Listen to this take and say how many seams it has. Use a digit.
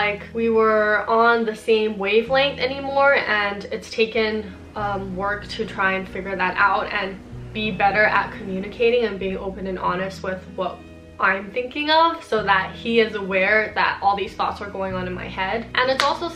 0